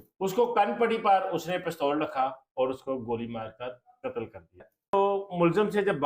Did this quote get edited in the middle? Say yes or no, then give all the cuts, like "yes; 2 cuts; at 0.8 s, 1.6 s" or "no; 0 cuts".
yes; 1 cut; at 4.9 s